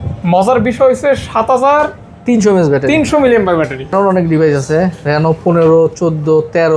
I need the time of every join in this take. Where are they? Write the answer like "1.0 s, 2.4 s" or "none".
3.9 s

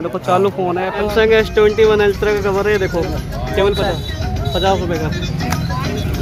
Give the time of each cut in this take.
1.0 s

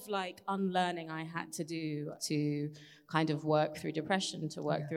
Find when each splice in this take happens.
2.1 s

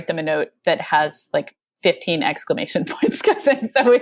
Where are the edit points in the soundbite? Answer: none

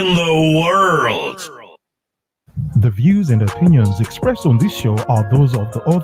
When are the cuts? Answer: 2.3 s

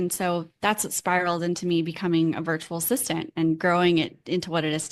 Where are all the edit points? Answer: none

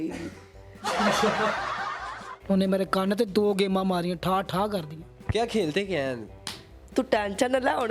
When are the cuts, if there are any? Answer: 2.3 s

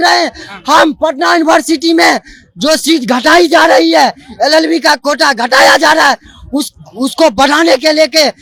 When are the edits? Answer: none

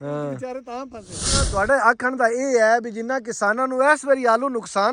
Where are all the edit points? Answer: 1.5 s

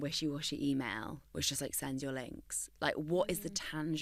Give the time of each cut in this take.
none

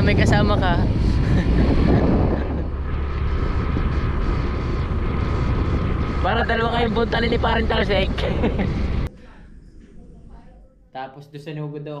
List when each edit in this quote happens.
9.2 s

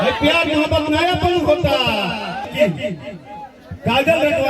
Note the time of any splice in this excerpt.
2.5 s

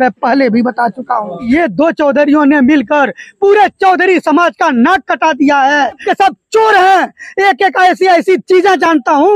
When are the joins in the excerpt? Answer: 1.5 s, 6.0 s

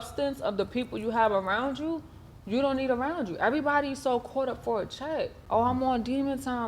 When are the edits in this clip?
5.4 s

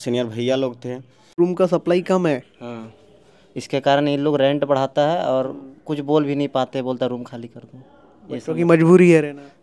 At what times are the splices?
1.3 s

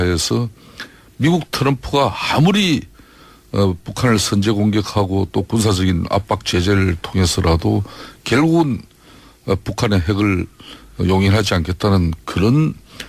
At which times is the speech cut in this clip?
5.3 s

